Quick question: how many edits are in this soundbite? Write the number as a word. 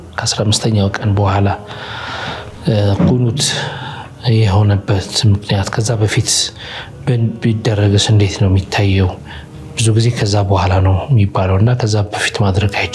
zero